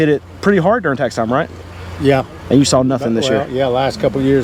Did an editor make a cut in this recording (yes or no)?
no